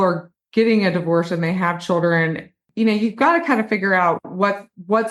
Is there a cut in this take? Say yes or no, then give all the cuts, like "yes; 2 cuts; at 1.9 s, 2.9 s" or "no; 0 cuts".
yes; 1 cut; at 2.6 s